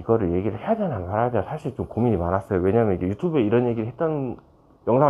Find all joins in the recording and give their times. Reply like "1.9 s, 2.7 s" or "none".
none